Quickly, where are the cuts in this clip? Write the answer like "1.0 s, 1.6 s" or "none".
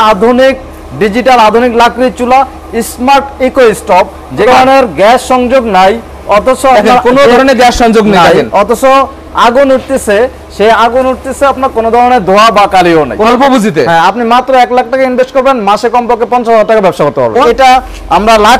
4.5 s, 13.3 s, 17.4 s

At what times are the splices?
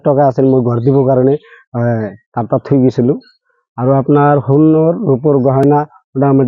none

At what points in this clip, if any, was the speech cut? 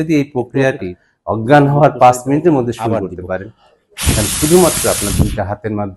0.9 s

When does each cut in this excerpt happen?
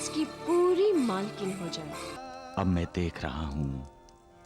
2.2 s

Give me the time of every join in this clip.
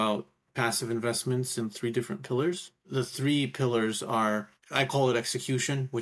2.9 s, 4.6 s

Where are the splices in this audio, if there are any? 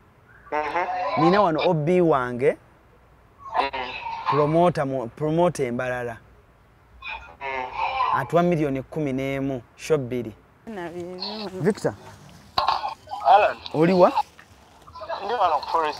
10.7 s

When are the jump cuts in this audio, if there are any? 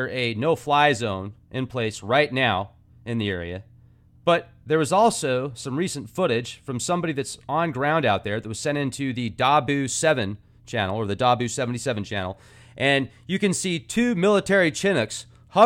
none

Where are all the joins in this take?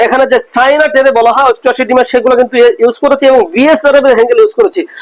none

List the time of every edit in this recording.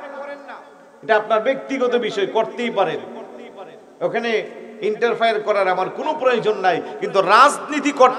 none

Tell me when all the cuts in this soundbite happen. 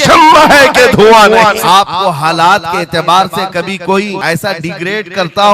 1.6 s, 4.2 s

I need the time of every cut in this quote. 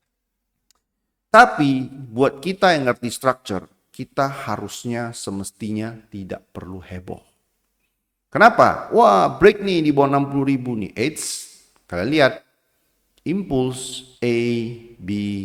none

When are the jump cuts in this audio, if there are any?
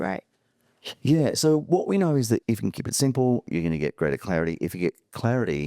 2.4 s

